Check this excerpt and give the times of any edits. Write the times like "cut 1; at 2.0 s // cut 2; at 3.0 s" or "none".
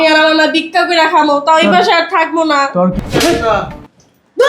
cut 1; at 3.0 s